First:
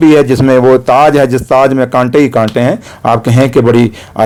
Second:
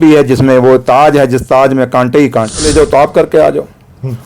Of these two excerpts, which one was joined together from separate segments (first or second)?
second